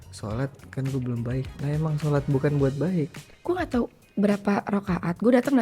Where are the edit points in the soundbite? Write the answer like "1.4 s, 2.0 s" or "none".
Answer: 3.3 s